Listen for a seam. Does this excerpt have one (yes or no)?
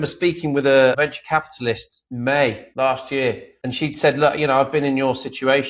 yes